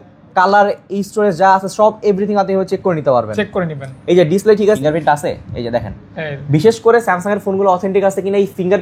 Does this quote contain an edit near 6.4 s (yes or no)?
no